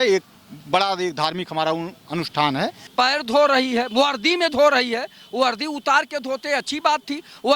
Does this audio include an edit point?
yes; 1 cut; at 2.8 s

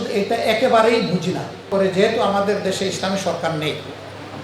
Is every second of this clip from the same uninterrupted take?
no; 1 cut; at 1.7 s

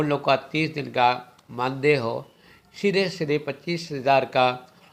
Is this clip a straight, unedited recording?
yes; 0 cuts

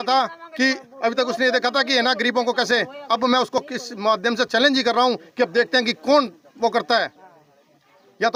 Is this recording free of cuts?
yes; 0 cuts

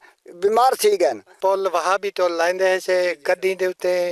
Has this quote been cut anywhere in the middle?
yes; 1 cut; at 1.3 s

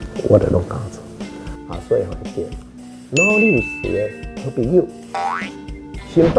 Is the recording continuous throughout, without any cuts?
yes; 0 cuts

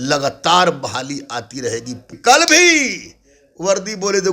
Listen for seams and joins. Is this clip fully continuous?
no; 1 cut; at 2.2 s

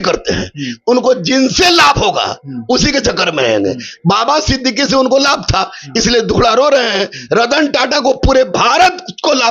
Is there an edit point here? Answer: no; 0 cuts

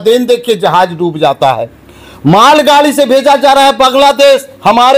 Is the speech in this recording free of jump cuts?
yes; 0 cuts

